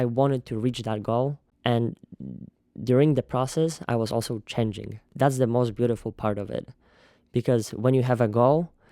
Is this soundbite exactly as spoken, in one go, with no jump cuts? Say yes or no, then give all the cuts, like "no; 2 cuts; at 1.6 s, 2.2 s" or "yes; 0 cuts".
no; 2 cuts; at 1.5 s, 5.1 s